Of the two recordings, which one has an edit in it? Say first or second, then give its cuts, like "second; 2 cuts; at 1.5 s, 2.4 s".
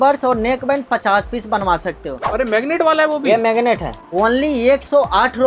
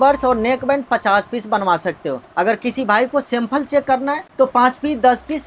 first; 2 cuts; at 2.2 s, 4.0 s